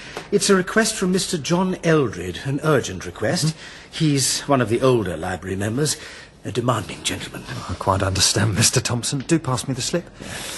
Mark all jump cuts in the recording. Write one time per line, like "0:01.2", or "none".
0:06.0